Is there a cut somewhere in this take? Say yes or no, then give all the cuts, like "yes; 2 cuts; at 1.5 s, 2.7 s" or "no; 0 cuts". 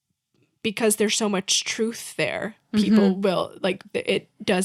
no; 0 cuts